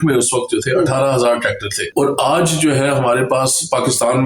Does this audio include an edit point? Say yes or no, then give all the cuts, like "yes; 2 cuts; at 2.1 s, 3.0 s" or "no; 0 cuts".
yes; 1 cut; at 1.7 s